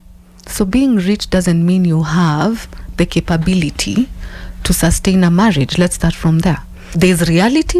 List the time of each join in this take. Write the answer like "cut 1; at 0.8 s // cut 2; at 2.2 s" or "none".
cut 1; at 6.8 s